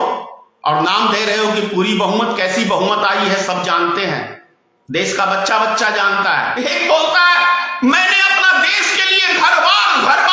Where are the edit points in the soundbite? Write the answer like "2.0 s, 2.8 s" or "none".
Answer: 6.5 s